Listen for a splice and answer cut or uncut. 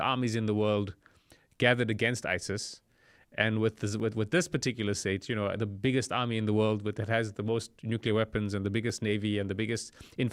uncut